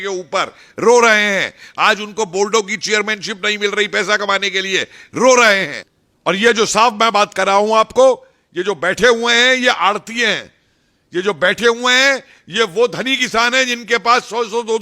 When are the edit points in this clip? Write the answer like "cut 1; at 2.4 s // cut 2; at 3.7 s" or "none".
cut 1; at 5.7 s